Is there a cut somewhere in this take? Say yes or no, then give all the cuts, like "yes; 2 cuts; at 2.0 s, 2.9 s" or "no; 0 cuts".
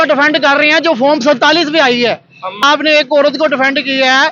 yes; 1 cut; at 2.6 s